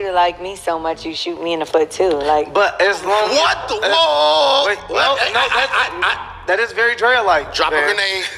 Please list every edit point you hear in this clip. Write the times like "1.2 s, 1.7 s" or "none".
none

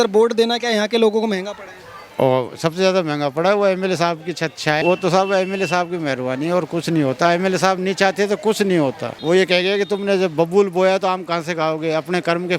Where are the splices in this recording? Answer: 4.8 s, 9.1 s

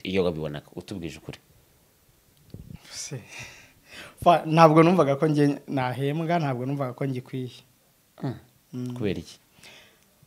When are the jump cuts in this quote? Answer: none

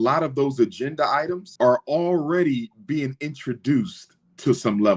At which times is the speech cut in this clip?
1.5 s

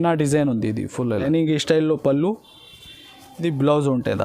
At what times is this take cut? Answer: 1.2 s

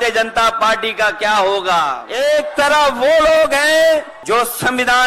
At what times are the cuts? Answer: 2.0 s, 4.1 s

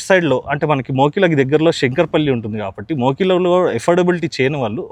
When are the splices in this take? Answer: none

